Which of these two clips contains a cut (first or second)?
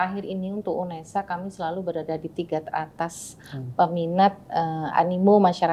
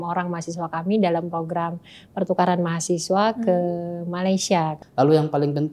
second